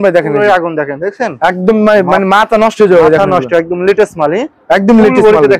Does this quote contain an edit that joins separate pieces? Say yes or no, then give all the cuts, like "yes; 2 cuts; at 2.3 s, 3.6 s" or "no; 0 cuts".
no; 0 cuts